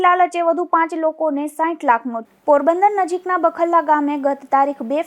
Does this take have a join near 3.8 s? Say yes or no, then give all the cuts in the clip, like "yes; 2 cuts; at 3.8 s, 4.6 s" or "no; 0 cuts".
no; 1 cut; at 2.2 s